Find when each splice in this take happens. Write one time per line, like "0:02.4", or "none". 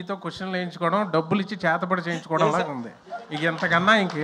none